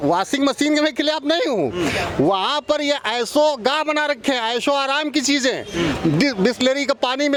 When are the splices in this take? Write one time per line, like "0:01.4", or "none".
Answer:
none